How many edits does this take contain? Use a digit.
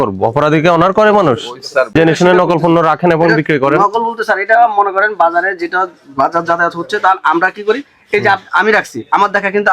1